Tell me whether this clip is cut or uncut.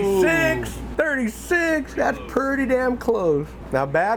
uncut